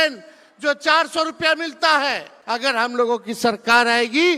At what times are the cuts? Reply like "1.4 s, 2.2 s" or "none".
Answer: 2.8 s

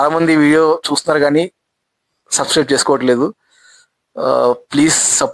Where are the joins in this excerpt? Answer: none

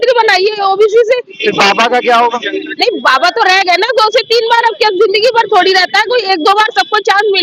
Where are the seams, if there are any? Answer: none

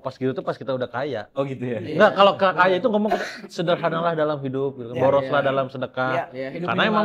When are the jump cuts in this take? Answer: none

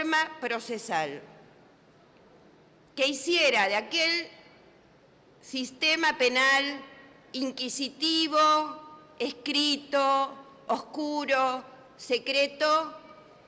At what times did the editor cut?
2.1 s

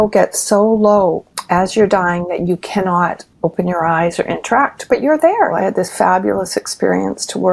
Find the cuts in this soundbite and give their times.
1.3 s, 3.3 s, 5.5 s

